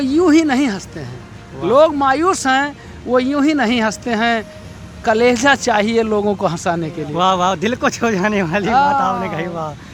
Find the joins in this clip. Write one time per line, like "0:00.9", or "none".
none